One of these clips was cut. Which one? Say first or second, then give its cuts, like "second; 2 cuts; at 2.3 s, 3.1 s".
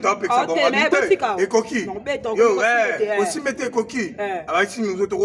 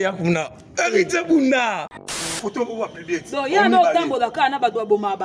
second; 1 cut; at 2.3 s